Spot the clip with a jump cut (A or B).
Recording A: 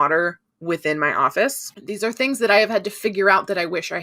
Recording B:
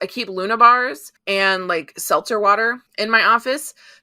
B